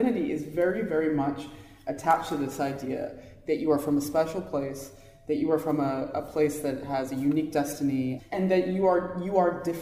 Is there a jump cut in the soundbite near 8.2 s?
yes; 1 cut; at 8.2 s

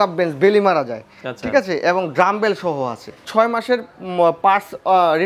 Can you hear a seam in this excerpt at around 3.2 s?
yes; 1 cut; at 3.2 s

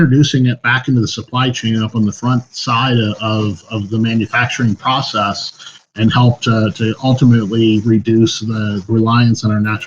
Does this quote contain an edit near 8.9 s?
yes; 1 cut; at 8.9 s

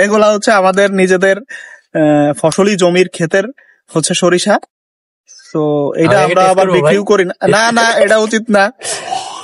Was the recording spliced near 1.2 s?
no; 0 cuts

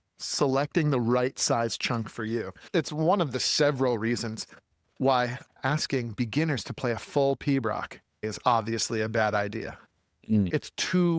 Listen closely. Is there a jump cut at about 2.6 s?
yes; 2 cuts; at 2.6 s, 8.3 s

